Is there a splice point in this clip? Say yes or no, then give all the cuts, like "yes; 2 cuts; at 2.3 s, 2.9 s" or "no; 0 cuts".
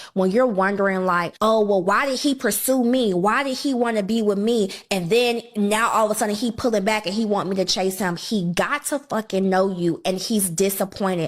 yes; 1 cut; at 8.3 s